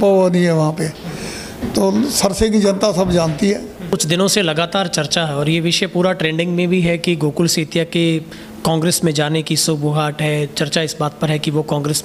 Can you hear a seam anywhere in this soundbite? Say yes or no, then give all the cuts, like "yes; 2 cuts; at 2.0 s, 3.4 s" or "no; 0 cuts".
yes; 1 cut; at 3.9 s